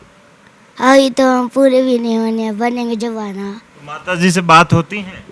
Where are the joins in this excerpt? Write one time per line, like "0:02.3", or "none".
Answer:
0:03.9